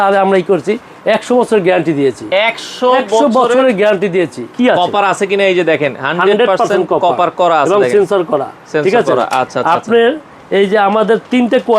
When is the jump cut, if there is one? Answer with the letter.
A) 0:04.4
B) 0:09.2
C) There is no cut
A